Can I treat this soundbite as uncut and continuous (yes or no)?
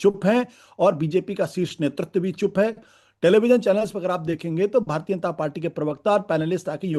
yes